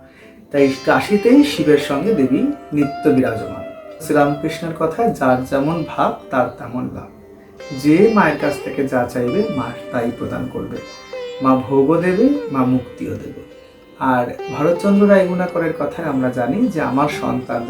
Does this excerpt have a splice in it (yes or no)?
yes